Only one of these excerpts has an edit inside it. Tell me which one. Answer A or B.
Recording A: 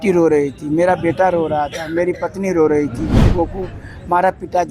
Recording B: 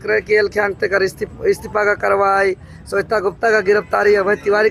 A